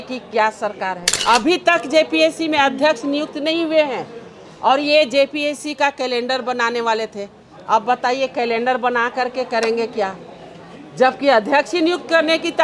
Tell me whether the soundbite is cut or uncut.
cut